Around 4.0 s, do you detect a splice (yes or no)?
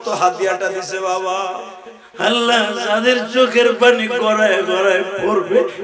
no